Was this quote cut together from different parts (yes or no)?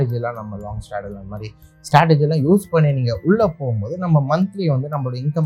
no